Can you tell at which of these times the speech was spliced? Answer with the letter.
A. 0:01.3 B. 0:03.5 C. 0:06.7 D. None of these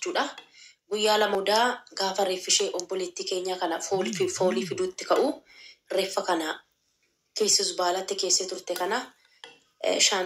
A